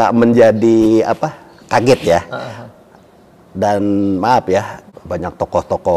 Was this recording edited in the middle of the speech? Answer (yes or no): yes